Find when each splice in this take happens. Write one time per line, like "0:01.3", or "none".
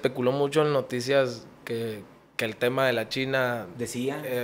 none